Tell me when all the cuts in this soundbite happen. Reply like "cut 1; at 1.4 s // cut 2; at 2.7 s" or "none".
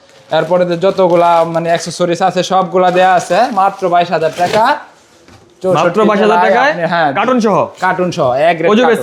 none

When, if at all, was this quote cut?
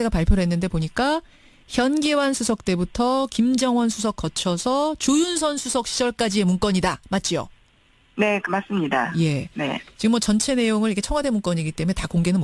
none

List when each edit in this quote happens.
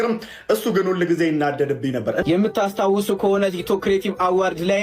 cut 1; at 2.2 s

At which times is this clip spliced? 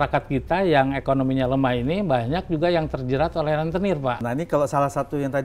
cut 1; at 4.2 s

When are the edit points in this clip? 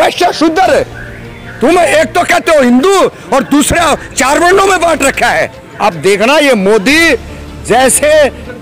cut 1; at 5.6 s

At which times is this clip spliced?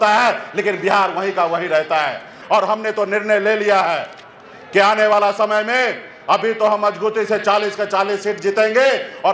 cut 1; at 2.4 s

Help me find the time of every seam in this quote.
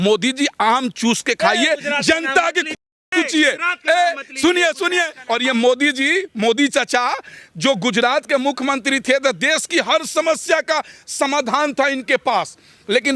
cut 1; at 5.2 s

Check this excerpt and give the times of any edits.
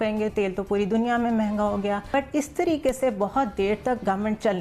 cut 1; at 2.1 s

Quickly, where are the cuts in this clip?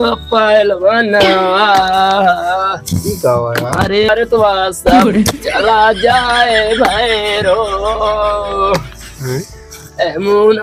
none

